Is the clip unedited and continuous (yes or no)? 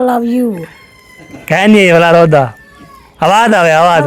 yes